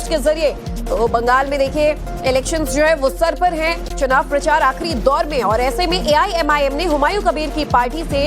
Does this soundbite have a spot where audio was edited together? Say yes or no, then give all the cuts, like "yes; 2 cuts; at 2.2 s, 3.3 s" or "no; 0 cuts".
yes; 1 cut; at 3.4 s